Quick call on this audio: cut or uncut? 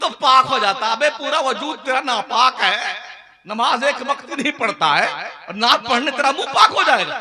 uncut